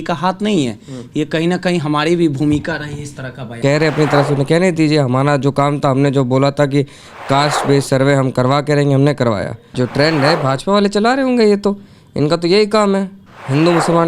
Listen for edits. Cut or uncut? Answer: cut